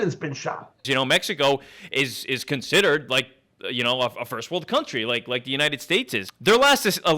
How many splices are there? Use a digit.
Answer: 2